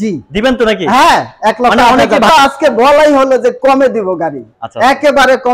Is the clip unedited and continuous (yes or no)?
no